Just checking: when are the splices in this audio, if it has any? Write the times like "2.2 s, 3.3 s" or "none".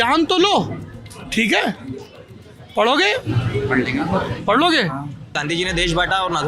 5.3 s